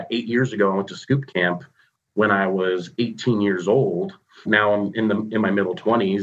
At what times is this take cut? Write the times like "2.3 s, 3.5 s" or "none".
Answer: 4.5 s